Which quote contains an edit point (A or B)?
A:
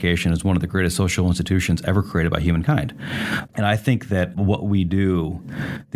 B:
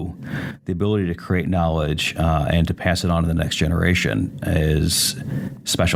A